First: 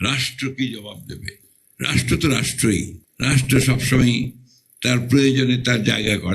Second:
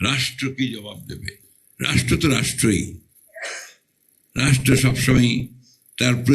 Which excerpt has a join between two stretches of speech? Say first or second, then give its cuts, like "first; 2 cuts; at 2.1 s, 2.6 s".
first; 1 cut; at 3.0 s